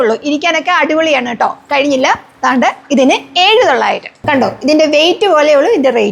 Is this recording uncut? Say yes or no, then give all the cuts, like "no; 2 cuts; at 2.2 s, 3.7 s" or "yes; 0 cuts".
no; 1 cut; at 4.2 s